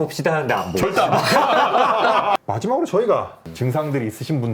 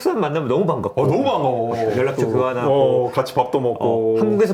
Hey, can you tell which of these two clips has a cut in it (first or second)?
first